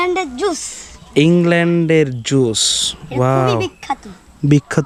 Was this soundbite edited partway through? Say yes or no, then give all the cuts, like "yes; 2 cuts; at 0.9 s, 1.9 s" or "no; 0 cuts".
no; 0 cuts